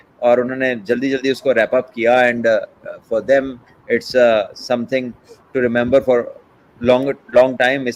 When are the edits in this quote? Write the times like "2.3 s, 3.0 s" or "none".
none